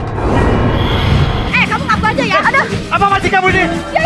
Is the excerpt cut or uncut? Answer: cut